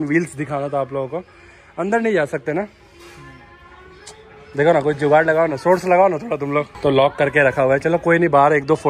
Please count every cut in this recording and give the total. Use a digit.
0